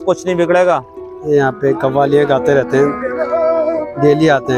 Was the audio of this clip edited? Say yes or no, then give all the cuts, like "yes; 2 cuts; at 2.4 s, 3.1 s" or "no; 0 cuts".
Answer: yes; 1 cut; at 1.1 s